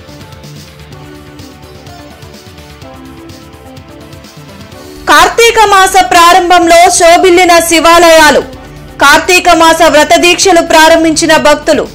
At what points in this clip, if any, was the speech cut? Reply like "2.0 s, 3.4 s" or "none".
none